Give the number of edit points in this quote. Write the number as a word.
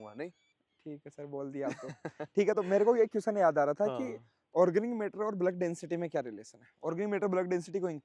zero